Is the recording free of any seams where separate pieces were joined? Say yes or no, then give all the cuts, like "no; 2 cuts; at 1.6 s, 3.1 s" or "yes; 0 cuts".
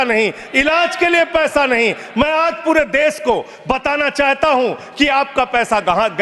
yes; 0 cuts